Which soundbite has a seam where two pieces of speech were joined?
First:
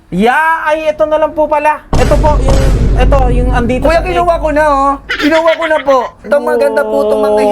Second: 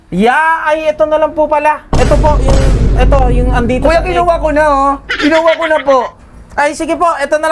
first; 1 cut; at 6.3 s

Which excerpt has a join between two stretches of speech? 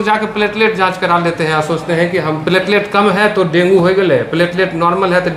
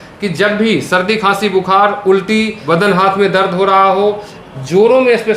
second; 1 cut; at 2.6 s

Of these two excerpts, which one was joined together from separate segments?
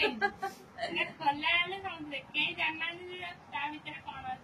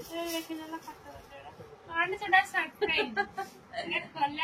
second; 1 cut; at 2.0 s

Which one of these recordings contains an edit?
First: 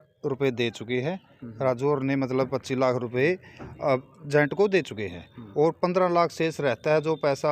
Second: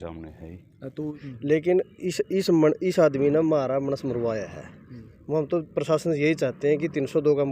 second; 1 cut; at 1.2 s

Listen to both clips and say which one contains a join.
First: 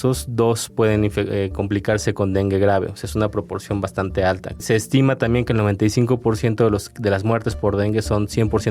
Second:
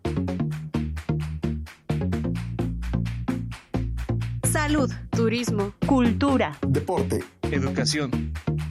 first; 1 cut; at 4.6 s

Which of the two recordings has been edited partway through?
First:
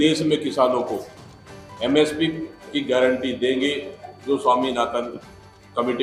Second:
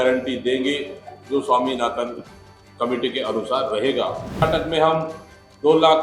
second; 1 cut; at 4.4 s

